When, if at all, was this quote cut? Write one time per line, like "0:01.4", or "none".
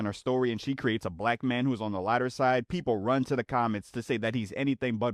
none